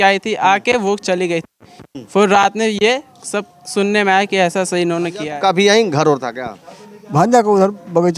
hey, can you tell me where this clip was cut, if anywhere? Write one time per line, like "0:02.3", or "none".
0:05.2